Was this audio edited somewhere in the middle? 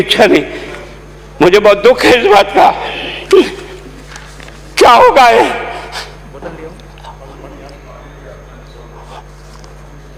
no; 0 cuts

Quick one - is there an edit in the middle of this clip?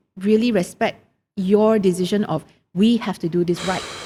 no; 0 cuts

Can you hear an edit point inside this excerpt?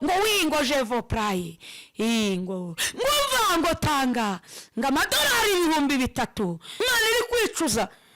yes; 1 cut; at 6.7 s

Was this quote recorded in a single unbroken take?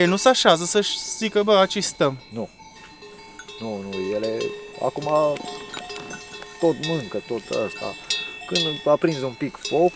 yes; 0 cuts

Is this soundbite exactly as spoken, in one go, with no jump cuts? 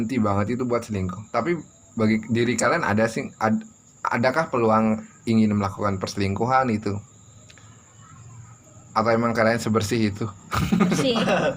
yes; 0 cuts

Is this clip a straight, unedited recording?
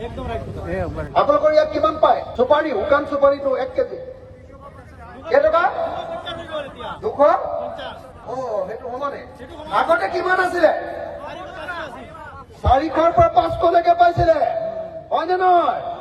no; 1 cut; at 2.3 s

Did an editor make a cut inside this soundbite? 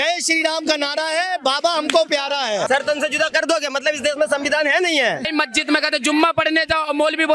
yes; 2 cuts; at 2.7 s, 5.3 s

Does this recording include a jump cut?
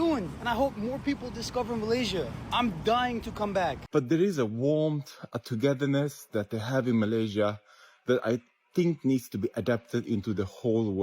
yes; 1 cut; at 3.8 s

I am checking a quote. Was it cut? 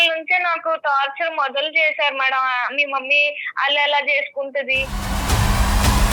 no; 0 cuts

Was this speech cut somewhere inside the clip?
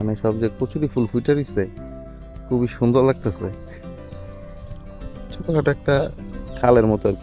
no; 0 cuts

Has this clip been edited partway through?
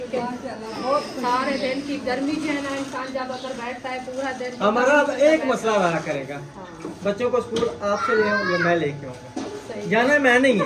no; 0 cuts

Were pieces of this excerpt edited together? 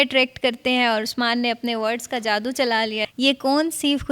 yes; 1 cut; at 3.1 s

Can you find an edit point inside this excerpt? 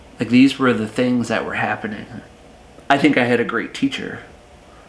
yes; 1 cut; at 2.2 s

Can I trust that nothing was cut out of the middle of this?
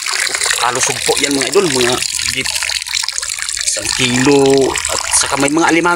yes; 0 cuts

